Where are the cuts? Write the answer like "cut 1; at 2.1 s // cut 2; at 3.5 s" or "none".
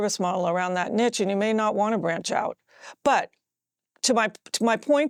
none